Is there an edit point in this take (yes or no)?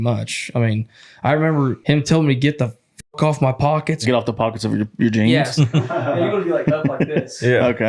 yes